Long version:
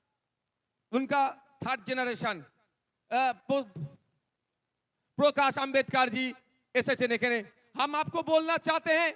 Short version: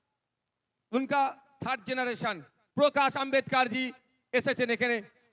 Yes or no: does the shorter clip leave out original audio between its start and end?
yes